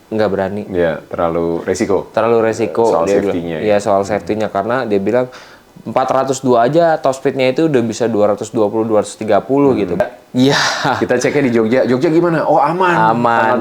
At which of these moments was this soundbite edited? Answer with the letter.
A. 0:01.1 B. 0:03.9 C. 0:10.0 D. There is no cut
C